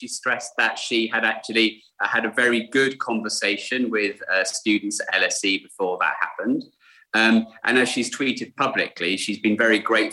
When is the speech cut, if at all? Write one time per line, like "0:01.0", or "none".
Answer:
none

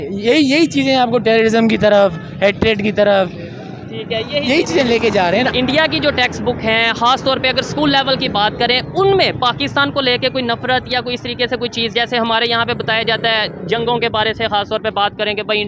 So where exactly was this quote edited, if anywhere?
0:05.5

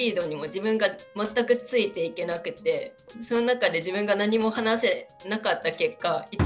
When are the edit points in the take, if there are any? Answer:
none

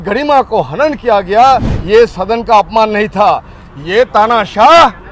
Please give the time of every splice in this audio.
0:01.7

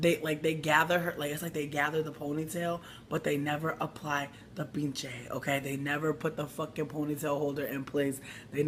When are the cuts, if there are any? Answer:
none

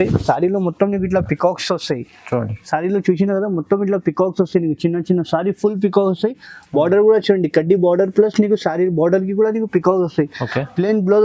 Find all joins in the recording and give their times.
none

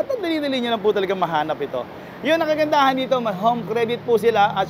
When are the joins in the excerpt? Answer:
none

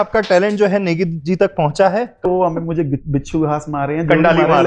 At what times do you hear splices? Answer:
0:02.3

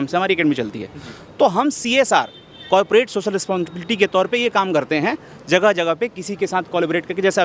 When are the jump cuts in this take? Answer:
none

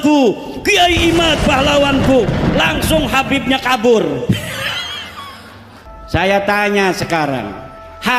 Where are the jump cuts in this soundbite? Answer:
0:05.8

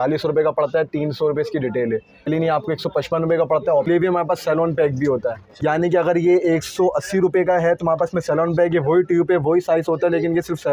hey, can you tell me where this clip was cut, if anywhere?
0:02.3
0:03.9
0:05.5

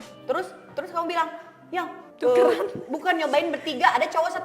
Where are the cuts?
0:02.0

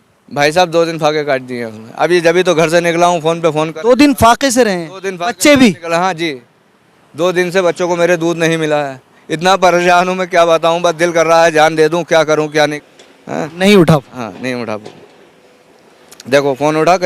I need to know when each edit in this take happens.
0:12.8

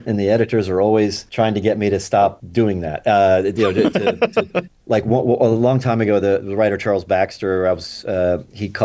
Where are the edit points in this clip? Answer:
0:01.2
0:02.4

